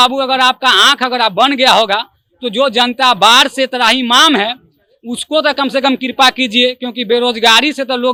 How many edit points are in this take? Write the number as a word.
zero